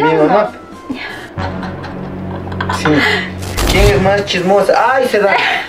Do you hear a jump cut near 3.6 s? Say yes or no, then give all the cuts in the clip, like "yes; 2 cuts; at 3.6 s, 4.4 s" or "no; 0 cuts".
yes; 1 cut; at 3.6 s